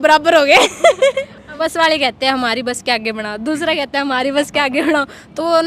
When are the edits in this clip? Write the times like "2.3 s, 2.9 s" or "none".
1.6 s

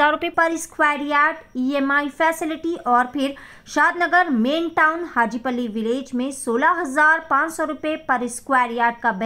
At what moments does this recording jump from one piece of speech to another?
none

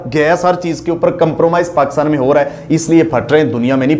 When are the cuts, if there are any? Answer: none

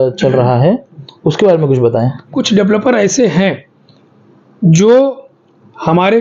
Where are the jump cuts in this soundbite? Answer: 2.4 s

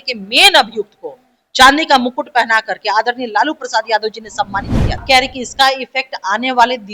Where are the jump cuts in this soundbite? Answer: 5.0 s

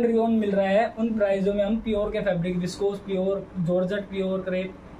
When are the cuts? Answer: none

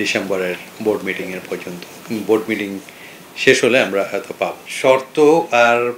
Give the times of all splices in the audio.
4.6 s

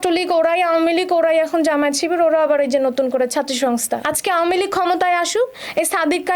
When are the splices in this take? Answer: 4.1 s

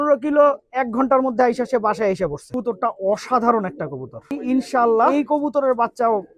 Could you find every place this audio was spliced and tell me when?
2.5 s, 4.3 s, 5.1 s

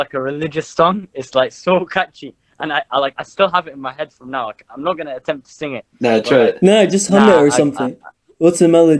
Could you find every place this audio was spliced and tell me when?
none

